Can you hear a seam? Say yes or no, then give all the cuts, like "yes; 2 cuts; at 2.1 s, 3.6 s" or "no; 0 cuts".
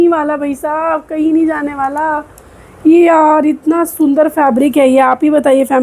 no; 0 cuts